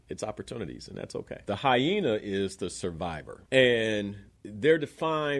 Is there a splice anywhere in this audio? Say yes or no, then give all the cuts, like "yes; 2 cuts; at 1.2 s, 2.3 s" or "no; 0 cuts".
yes; 3 cuts; at 1.4 s, 3.3 s, 4.2 s